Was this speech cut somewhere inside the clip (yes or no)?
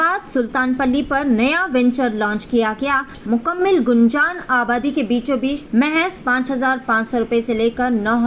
yes